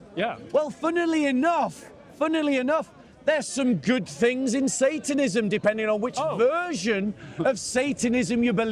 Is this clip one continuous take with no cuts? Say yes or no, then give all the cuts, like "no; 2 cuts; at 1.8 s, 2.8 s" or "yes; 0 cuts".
yes; 0 cuts